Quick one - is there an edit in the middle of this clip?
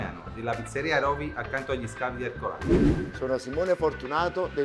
yes; 2 cuts; at 2.6 s, 3.1 s

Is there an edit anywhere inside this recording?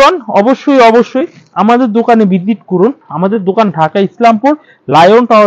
no; 0 cuts

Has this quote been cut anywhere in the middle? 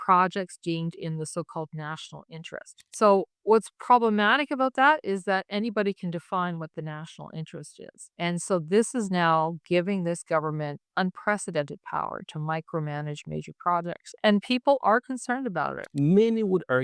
yes; 1 cut; at 15.8 s

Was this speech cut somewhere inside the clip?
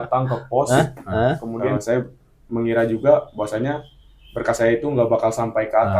yes; 1 cut; at 1.7 s

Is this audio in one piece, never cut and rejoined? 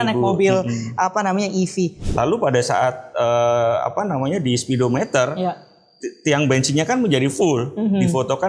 no; 1 cut; at 2.0 s

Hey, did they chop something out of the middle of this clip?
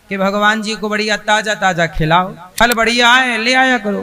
yes; 1 cut; at 2.4 s

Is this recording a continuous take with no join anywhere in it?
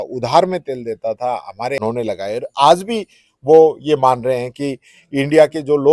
no; 1 cut; at 1.8 s

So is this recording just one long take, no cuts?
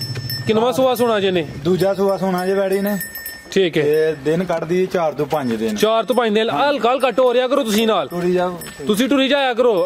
yes; 0 cuts

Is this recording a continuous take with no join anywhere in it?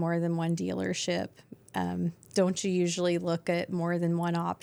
yes; 0 cuts

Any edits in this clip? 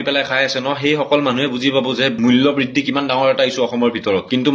no; 0 cuts

